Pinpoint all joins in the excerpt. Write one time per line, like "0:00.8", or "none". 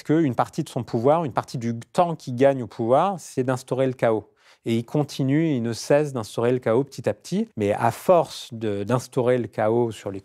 0:07.5